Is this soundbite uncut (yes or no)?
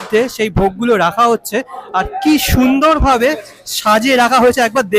yes